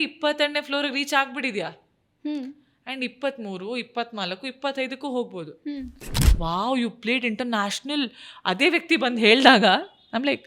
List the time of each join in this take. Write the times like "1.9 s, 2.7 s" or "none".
6.4 s